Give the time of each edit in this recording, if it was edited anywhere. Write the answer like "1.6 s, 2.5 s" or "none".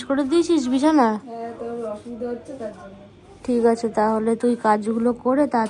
none